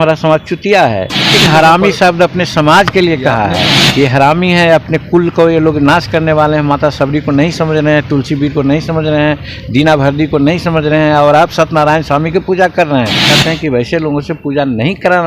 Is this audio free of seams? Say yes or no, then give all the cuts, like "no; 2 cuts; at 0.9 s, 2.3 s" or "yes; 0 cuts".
no; 3 cuts; at 1.4 s, 3.8 s, 13.3 s